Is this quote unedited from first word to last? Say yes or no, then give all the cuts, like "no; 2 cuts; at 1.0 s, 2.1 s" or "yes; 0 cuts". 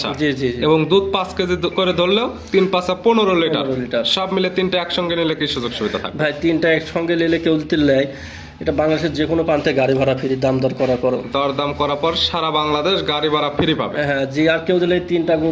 yes; 0 cuts